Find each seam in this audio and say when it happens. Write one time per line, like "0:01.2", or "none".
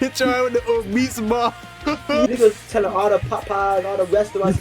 0:02.3